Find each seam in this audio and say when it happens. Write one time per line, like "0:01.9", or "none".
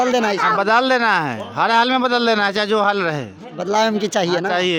none